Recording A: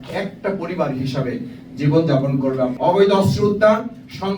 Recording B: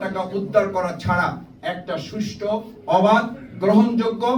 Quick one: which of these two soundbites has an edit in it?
A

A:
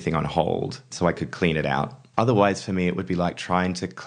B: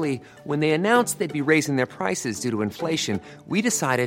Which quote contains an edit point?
A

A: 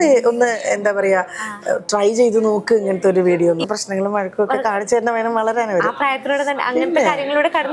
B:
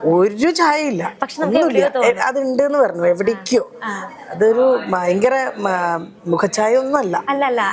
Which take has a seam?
A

